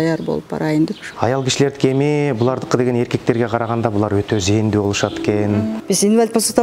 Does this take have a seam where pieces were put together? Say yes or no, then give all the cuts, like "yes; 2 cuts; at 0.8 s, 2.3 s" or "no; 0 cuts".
yes; 2 cuts; at 1.0 s, 5.5 s